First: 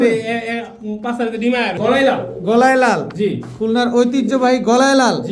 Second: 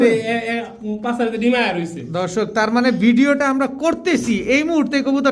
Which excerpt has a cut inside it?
first; 1 cut; at 1.8 s

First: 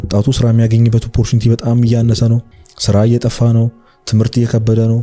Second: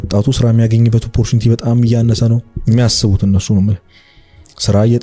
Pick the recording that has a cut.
first; 1 cut; at 2.5 s

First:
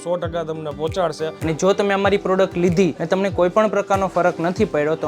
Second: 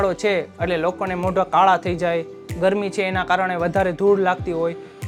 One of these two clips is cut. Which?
first; 2 cuts; at 1.3 s, 3.0 s

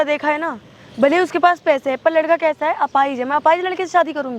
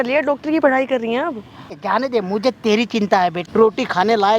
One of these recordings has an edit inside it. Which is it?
second; 2 cuts; at 1.8 s, 3.4 s

